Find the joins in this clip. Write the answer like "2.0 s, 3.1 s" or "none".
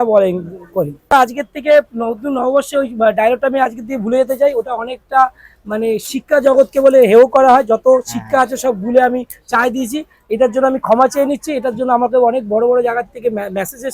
1.1 s